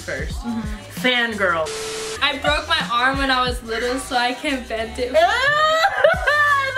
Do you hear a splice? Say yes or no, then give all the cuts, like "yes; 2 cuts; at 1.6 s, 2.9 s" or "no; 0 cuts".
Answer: yes; 1 cut; at 1.9 s